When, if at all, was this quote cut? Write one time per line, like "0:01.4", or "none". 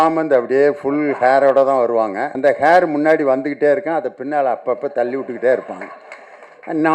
0:02.2